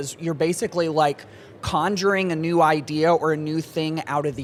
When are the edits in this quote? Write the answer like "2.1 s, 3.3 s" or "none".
none